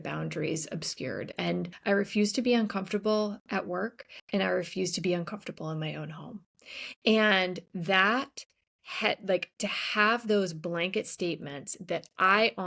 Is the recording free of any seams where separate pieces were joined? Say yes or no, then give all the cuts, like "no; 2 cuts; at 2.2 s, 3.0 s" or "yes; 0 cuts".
no; 1 cut; at 1.7 s